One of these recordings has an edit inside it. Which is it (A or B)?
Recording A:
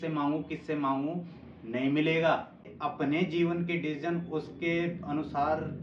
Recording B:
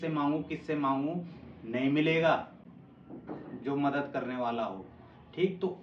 A